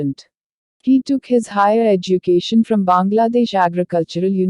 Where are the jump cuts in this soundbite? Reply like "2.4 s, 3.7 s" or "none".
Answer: 1.0 s